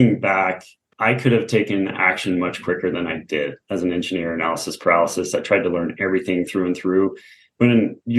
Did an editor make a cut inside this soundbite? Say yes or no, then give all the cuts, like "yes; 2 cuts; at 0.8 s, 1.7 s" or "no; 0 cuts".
yes; 1 cut; at 3.6 s